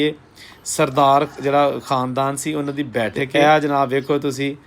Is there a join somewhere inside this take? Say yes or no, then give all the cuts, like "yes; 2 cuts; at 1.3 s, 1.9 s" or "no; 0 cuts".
yes; 1 cut; at 3.2 s